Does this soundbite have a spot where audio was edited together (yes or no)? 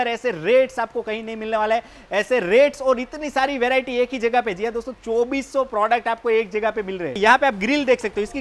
yes